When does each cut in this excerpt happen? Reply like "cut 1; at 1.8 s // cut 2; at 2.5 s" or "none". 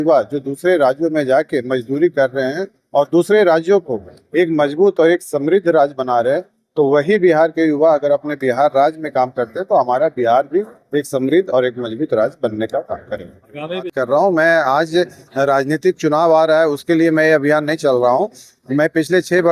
cut 1; at 13.9 s